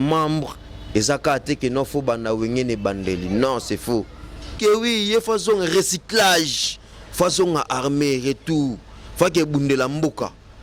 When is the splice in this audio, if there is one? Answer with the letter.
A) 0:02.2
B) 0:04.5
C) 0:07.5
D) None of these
B